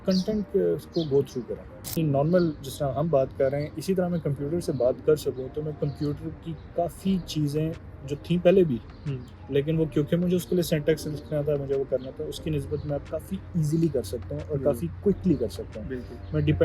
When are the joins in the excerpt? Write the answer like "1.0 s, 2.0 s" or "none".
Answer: 1.8 s